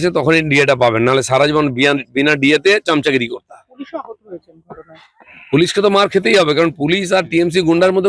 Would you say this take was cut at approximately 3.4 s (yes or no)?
no